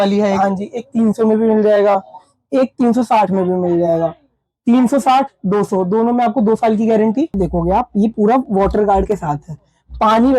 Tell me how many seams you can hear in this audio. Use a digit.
1